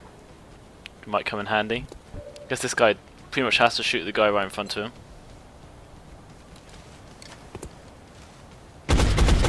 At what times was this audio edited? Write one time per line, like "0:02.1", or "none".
0:04.9